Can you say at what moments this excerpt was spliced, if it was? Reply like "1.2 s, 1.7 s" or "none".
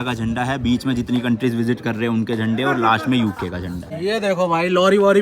3.9 s